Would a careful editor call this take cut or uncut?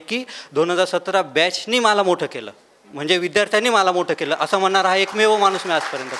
uncut